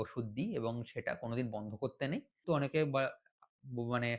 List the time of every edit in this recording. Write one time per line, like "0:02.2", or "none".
0:02.4